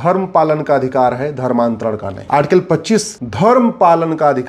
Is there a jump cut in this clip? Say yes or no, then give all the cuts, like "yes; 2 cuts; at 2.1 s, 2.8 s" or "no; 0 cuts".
yes; 2 cuts; at 2.1 s, 3.2 s